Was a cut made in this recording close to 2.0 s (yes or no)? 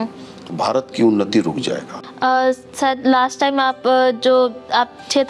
yes